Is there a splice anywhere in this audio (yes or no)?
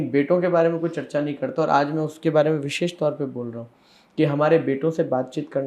no